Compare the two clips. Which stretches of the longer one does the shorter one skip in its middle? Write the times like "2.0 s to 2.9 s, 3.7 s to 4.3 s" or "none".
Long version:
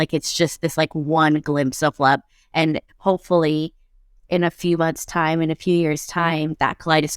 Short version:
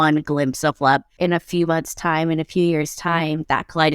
2.3 s to 4.2 s